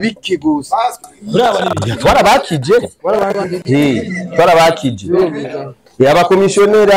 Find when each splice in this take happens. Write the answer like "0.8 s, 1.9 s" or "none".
none